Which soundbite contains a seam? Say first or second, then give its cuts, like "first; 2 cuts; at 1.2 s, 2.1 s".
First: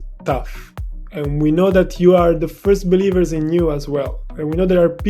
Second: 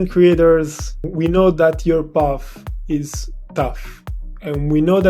second; 1 cut; at 1.0 s